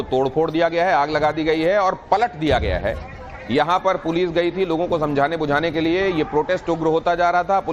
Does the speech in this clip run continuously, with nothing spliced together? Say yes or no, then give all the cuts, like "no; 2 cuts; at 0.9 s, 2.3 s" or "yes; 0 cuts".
yes; 0 cuts